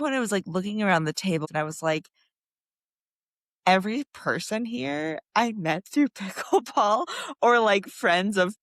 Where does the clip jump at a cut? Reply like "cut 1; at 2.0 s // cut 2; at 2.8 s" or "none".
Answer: cut 1; at 1.5 s